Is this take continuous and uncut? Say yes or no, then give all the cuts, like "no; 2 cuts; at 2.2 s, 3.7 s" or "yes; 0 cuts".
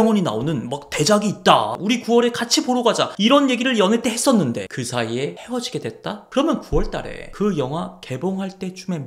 no; 2 cuts; at 1.7 s, 4.7 s